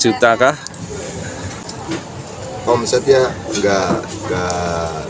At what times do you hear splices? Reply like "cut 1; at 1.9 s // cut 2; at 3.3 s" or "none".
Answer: cut 1; at 1.7 s